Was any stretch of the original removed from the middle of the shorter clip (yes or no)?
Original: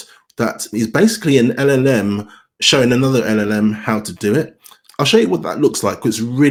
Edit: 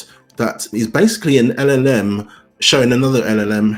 no